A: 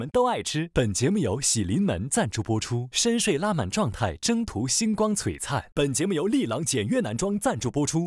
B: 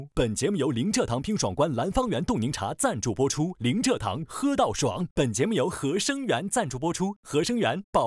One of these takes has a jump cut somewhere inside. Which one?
A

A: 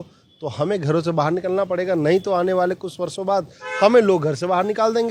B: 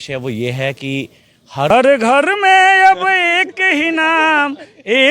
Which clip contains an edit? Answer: B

